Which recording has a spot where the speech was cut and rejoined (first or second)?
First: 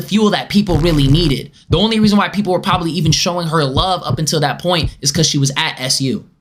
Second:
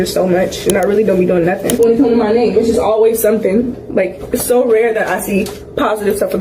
second